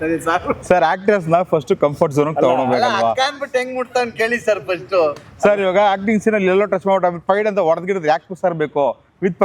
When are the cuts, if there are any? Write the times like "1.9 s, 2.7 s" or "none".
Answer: none